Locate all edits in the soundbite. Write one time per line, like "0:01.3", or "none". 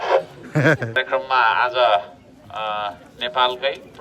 0:01.0